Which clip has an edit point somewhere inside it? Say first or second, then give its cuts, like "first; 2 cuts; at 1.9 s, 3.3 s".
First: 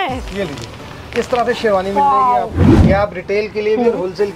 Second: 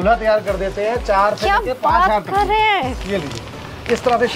first; 1 cut; at 2.8 s